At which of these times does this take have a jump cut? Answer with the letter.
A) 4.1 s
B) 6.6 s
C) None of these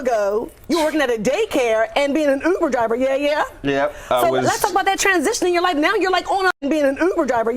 B